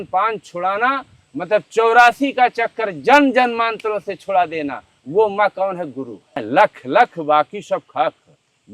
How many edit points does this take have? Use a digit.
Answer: 1